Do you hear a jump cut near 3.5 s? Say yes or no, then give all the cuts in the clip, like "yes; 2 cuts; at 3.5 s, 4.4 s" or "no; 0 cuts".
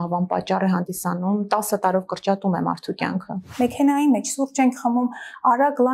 yes; 1 cut; at 3.5 s